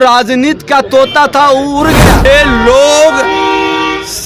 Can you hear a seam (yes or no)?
yes